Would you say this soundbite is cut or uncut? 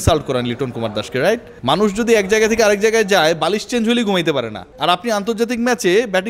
cut